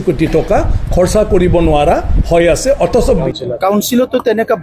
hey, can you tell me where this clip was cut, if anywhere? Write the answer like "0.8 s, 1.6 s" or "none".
3.2 s